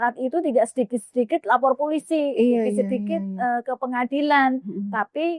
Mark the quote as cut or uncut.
uncut